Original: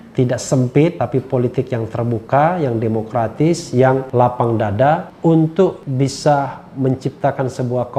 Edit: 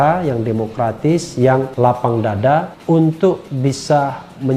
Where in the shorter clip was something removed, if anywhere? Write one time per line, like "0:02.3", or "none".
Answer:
none